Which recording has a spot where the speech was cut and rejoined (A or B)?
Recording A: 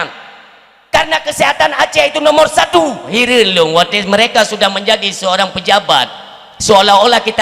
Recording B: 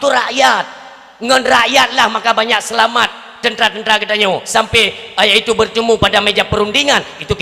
A